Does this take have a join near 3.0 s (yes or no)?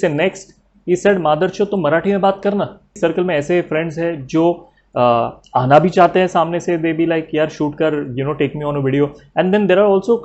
yes